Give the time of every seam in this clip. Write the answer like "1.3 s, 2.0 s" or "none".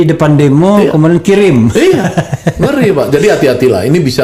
none